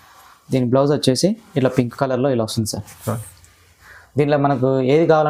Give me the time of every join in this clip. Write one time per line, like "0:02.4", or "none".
none